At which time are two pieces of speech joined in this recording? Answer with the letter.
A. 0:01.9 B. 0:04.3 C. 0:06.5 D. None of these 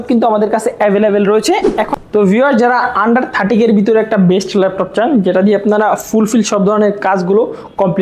A